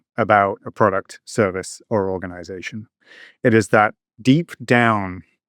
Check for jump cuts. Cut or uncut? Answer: cut